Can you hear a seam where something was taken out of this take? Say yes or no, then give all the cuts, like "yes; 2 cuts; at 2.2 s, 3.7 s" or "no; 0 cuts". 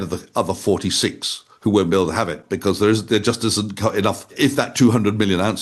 yes; 1 cut; at 4.3 s